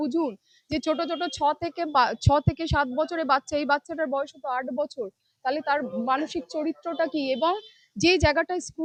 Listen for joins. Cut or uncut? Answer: uncut